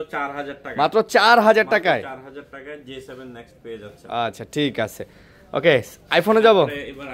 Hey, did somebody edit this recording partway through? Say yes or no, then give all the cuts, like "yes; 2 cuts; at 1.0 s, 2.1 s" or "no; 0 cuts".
no; 0 cuts